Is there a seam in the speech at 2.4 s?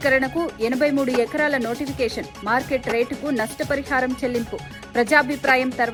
no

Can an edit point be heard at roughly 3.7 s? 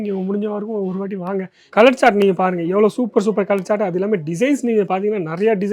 no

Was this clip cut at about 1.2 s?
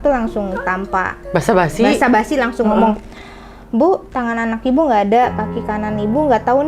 yes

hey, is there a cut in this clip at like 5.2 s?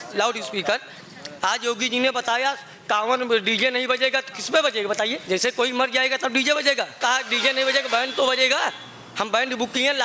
yes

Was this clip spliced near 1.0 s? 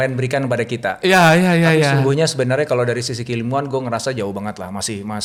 no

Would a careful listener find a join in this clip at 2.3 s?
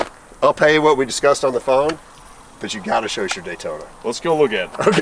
no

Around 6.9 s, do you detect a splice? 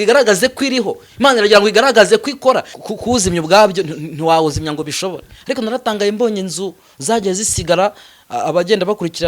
no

